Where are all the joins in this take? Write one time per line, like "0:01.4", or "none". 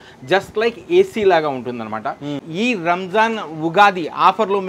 0:02.4